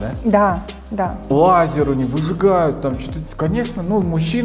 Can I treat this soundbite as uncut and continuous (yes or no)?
no